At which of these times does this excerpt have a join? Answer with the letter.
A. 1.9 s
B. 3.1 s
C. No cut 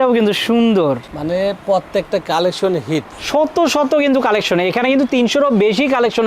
B